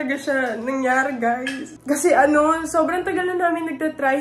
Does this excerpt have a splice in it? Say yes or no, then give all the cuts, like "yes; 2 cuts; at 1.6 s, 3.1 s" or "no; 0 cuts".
yes; 1 cut; at 1.7 s